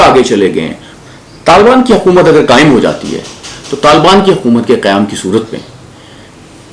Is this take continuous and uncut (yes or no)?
no